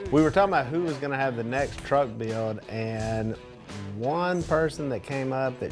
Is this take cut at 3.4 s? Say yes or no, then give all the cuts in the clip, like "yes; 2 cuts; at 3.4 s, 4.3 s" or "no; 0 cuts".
no; 0 cuts